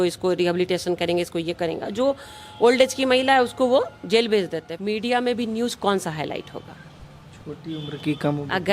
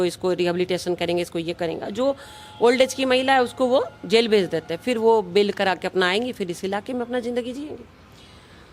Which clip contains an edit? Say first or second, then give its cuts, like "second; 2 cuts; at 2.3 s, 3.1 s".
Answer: first; 1 cut; at 4.6 s